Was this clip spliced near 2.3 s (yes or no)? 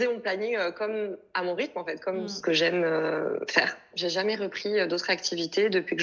yes